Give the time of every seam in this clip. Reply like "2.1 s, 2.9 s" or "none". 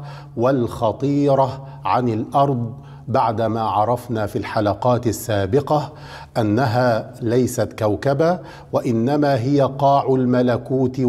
none

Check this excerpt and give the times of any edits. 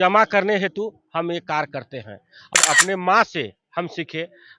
2.5 s

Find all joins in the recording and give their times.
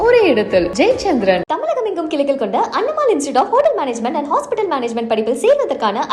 none

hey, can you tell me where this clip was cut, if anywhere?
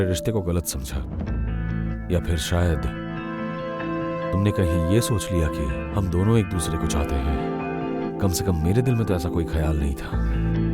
5.8 s

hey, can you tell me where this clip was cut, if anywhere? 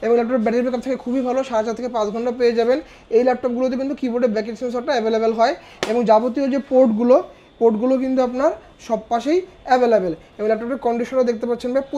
none

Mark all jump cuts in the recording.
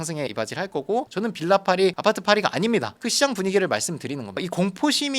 1.1 s

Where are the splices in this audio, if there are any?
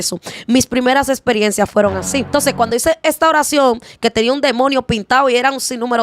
2.3 s

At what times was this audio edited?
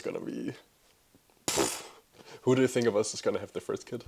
none

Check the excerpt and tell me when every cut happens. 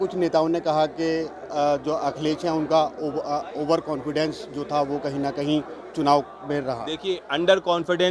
none

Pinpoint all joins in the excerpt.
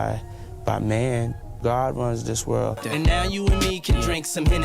1.4 s, 2.8 s

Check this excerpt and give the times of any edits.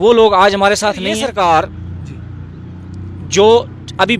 1.1 s

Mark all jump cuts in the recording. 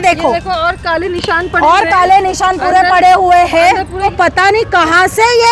4.1 s

